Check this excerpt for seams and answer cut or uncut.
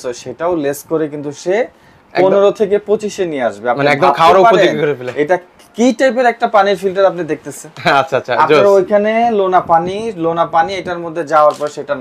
uncut